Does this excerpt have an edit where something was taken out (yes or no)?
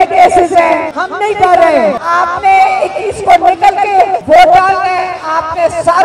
yes